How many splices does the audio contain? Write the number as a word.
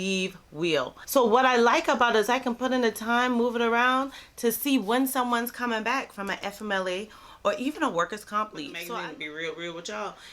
two